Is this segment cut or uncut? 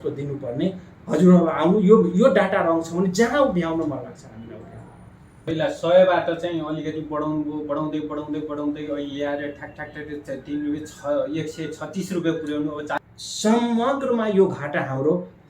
cut